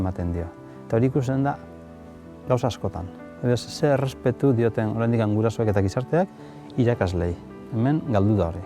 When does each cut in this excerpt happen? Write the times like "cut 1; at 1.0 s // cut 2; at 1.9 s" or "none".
none